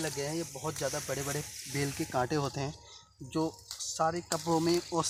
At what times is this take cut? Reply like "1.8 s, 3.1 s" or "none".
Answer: none

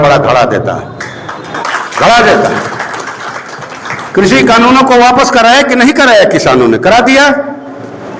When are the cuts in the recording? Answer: none

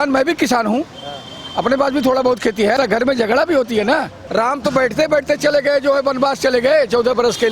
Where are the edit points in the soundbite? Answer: 2.7 s, 4.2 s

